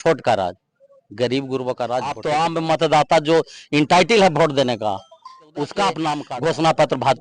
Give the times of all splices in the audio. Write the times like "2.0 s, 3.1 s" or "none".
2.2 s, 6.3 s